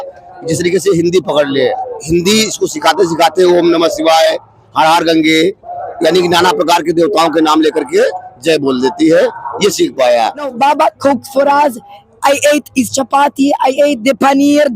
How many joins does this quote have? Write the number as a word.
two